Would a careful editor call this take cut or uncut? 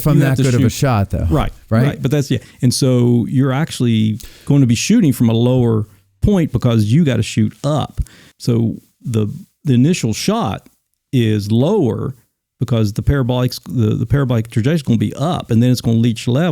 cut